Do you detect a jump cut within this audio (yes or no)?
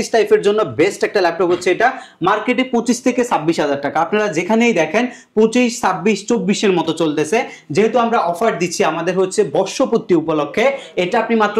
no